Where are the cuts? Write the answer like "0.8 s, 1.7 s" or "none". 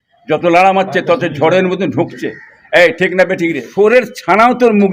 3.7 s